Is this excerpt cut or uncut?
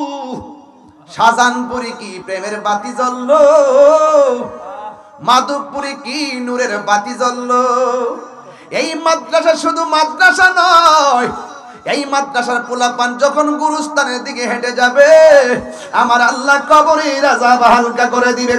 uncut